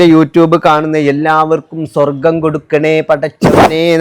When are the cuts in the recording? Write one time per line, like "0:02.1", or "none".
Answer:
none